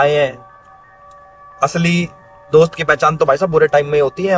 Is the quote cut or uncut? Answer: uncut